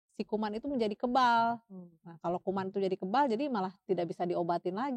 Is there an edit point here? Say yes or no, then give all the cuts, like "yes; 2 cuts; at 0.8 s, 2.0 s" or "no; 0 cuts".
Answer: no; 0 cuts